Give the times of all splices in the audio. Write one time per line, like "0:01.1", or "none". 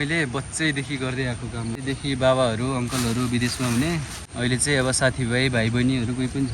0:01.8
0:04.2